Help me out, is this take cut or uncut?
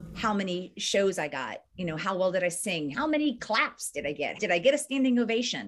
cut